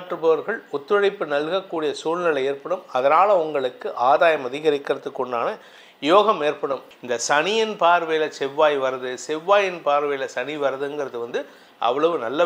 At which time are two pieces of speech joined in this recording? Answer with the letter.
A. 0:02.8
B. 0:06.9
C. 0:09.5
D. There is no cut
B